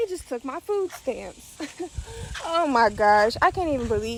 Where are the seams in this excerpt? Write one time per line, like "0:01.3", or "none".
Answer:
none